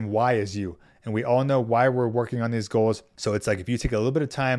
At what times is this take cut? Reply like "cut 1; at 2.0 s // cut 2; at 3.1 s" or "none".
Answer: cut 1; at 3.1 s